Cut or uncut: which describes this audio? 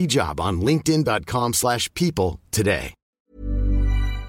cut